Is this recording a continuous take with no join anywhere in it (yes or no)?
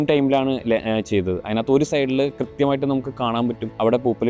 yes